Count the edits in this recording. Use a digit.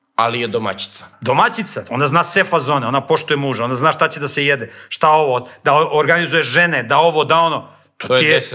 1